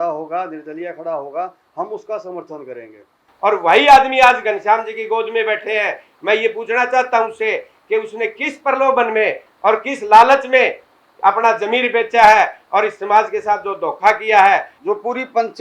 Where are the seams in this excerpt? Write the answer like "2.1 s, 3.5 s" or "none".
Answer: 3.3 s, 14.7 s